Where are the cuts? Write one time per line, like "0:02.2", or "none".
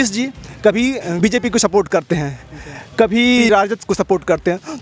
0:01.1
0:03.5